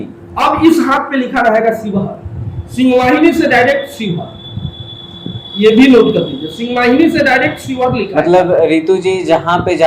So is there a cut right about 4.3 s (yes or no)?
no